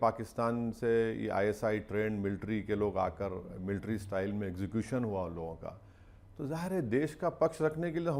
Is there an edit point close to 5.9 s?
no; 0 cuts

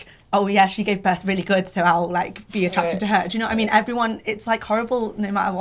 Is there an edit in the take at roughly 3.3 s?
no; 0 cuts

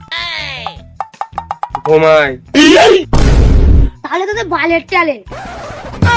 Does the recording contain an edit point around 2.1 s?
no; 0 cuts

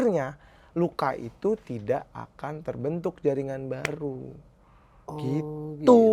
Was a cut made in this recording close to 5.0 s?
no; 0 cuts

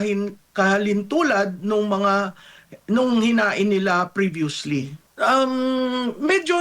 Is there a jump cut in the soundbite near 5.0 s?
yes; 1 cut; at 5.0 s

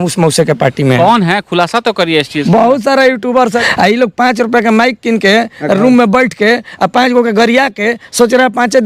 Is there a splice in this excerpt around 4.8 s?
no; 1 cut; at 3.6 s

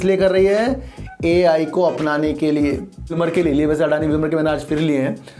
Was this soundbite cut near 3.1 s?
yes; 1 cut; at 3.1 s

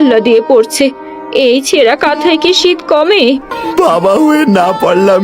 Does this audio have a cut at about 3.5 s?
yes; 1 cut; at 3.5 s

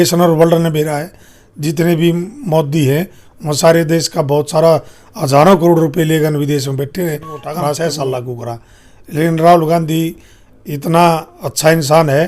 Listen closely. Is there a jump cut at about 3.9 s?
no; 1 cut; at 7.5 s

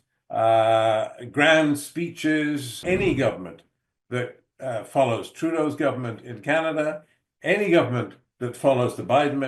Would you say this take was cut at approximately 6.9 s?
no; 1 cut; at 2.7 s

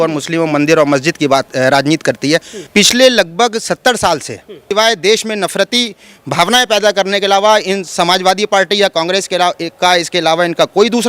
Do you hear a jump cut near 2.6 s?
yes; 2 cuts; at 2.6 s, 4.6 s

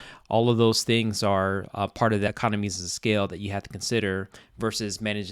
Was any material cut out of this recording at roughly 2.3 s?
yes; 1 cut; at 2.3 s

